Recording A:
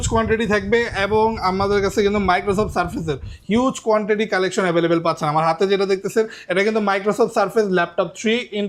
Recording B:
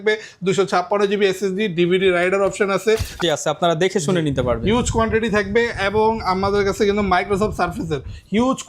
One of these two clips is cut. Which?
B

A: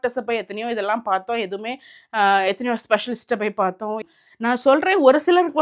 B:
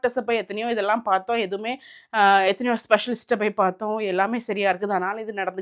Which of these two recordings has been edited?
A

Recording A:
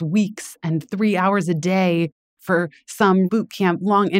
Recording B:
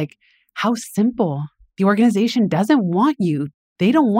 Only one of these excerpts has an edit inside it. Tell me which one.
A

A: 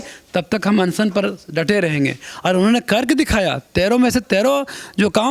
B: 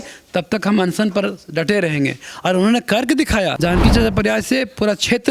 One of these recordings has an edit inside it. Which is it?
B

